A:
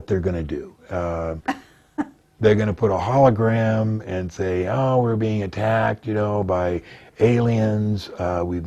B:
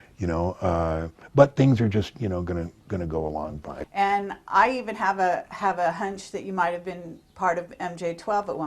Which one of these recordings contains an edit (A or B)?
B